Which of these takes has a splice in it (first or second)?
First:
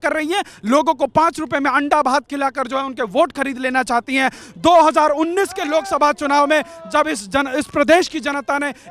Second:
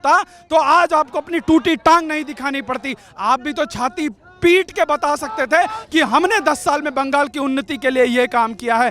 first